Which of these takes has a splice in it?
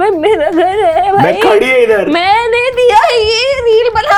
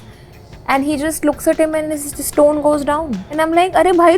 second; 1 cut; at 3.2 s

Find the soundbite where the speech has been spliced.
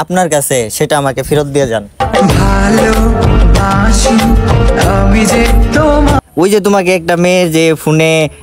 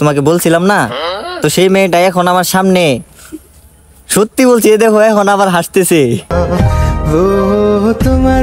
first; 1 cut; at 6.2 s

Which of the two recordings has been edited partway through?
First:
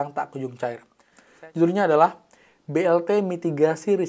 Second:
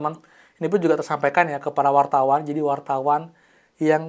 first; 1 cut; at 1.2 s

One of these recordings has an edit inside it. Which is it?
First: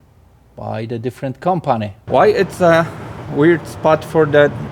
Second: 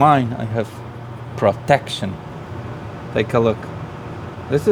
first; 1 cut; at 2.0 s

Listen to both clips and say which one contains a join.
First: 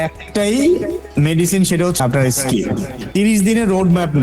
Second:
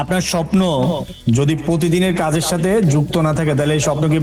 first; 2 cuts; at 2.0 s, 3.0 s

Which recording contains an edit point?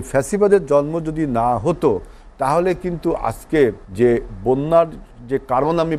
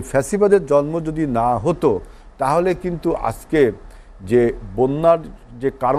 first; 1 cut; at 3.8 s

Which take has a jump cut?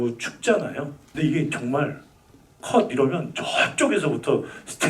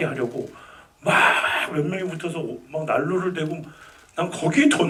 first; 1 cut; at 1.0 s

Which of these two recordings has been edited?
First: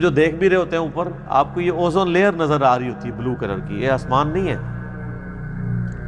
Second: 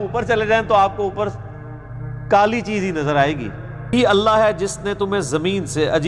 second; 1 cut; at 3.9 s

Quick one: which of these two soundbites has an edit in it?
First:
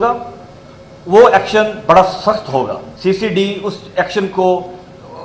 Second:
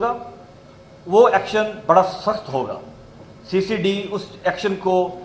first; 1 cut; at 2.8 s

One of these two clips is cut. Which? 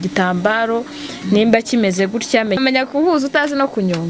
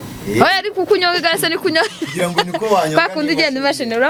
first; 1 cut; at 2.6 s

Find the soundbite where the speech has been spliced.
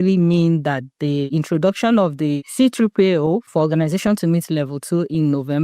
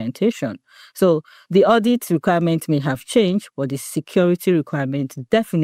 first; 3 cuts; at 1.3 s, 2.4 s, 3.5 s

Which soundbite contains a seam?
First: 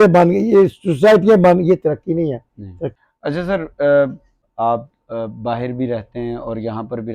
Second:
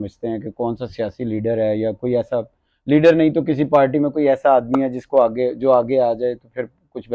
first; 2 cuts; at 2.9 s, 4.4 s

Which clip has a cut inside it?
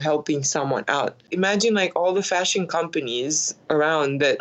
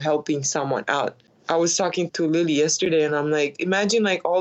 first; 1 cut; at 1.3 s

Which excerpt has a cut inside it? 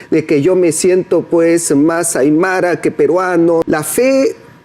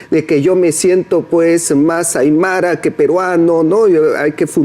first; 1 cut; at 3.6 s

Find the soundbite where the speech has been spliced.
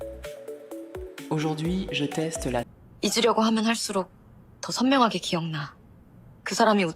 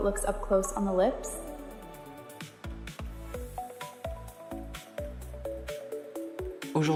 first; 1 cut; at 2.7 s

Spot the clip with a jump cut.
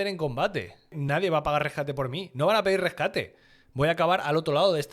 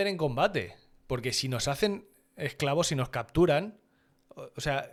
first; 1 cut; at 1.0 s

